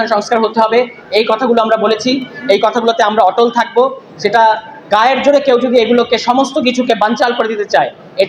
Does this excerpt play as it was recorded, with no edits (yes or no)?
yes